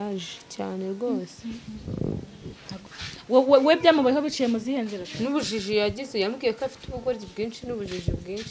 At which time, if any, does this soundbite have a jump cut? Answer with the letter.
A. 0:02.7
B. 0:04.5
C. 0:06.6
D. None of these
A